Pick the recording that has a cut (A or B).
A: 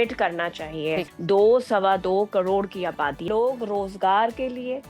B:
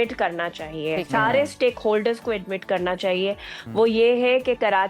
A